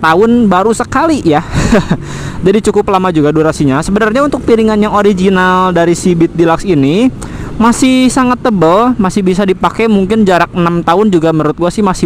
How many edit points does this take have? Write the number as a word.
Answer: zero